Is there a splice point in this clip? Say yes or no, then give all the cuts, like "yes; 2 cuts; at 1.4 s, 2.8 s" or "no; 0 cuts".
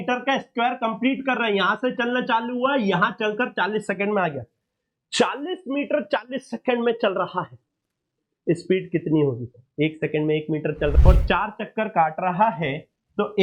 yes; 1 cut; at 10.9 s